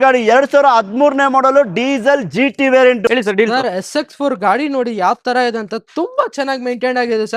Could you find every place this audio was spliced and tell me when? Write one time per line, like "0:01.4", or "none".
0:03.1